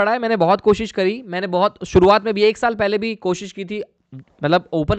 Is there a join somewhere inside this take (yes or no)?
no